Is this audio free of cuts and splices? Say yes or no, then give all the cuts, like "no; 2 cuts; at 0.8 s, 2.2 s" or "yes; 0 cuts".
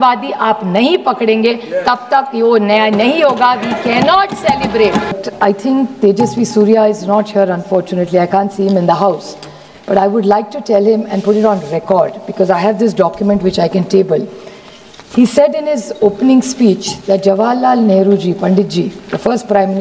no; 1 cut; at 5.1 s